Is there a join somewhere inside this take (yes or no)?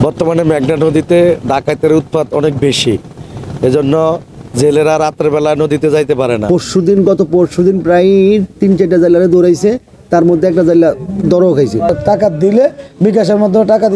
yes